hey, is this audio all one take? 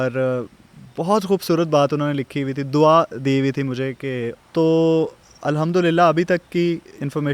no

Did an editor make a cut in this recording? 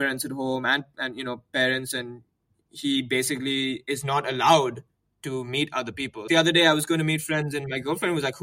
yes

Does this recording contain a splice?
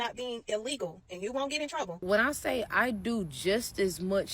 yes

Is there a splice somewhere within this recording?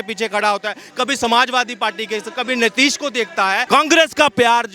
yes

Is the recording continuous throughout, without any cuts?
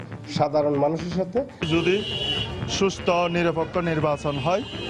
no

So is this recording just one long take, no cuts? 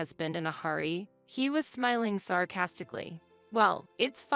no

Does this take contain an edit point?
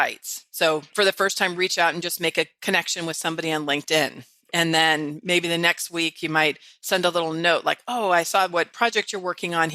yes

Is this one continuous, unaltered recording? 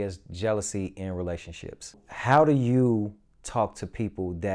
no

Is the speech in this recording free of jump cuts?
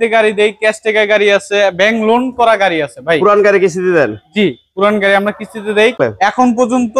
no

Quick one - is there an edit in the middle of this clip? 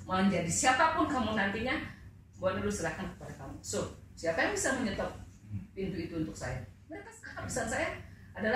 yes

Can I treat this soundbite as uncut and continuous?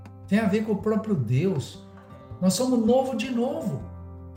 yes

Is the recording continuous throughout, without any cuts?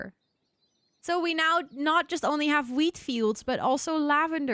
yes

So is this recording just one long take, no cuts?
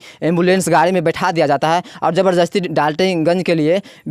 yes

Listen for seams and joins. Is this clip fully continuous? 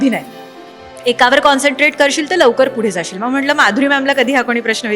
yes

